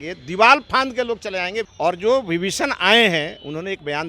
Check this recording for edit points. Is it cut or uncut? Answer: cut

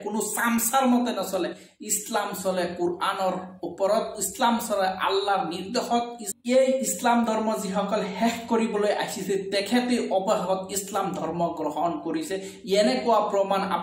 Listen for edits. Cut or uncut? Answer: uncut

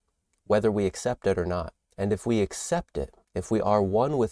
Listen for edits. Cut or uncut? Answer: cut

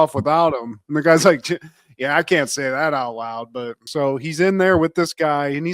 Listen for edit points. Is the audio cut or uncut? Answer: cut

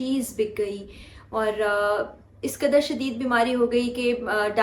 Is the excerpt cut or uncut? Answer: uncut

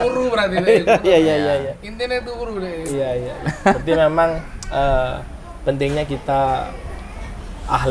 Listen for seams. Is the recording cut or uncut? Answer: uncut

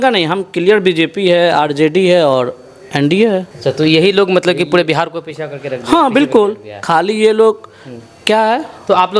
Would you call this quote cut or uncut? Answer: uncut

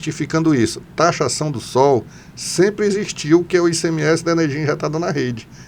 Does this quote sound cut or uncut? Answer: uncut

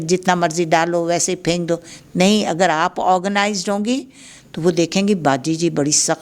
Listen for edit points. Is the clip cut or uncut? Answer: uncut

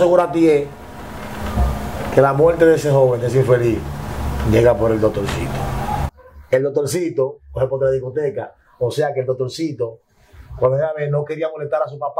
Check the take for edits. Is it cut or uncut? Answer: cut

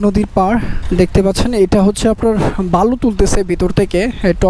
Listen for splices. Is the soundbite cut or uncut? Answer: uncut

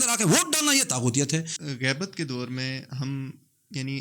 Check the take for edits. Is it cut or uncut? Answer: cut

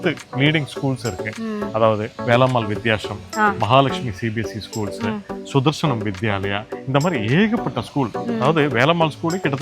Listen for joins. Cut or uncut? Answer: uncut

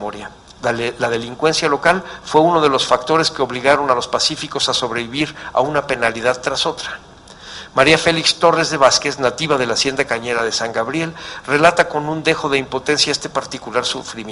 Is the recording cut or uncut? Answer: uncut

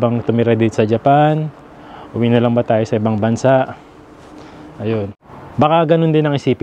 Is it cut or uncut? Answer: cut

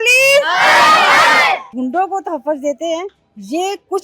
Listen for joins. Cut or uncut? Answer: cut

